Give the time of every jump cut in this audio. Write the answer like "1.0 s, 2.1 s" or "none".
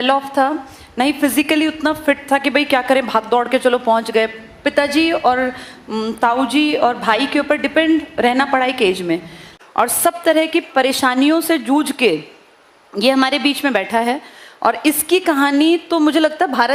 9.5 s